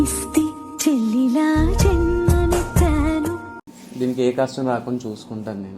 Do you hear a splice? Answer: yes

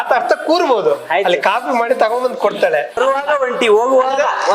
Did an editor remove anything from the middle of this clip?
yes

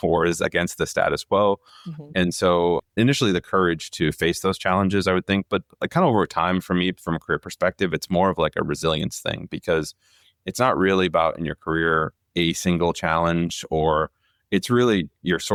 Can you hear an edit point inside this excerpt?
no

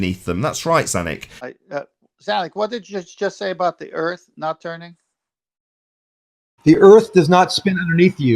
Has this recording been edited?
yes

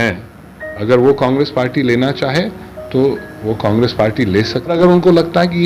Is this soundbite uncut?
no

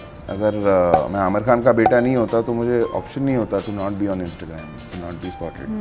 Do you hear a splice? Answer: no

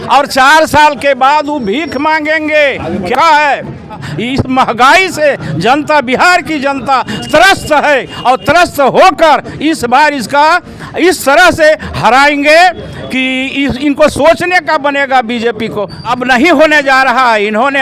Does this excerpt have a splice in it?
yes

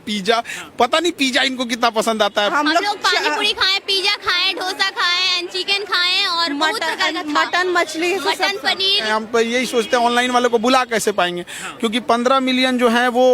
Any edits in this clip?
yes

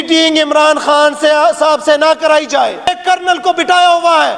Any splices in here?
yes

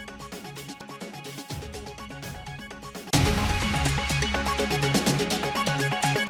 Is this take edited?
no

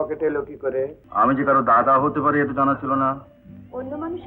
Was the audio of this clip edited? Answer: yes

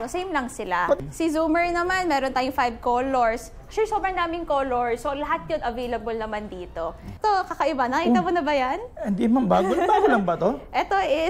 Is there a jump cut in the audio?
yes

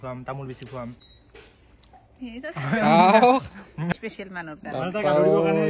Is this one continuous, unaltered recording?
no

